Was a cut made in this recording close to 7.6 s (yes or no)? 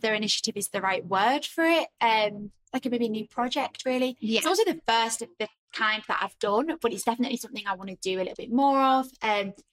no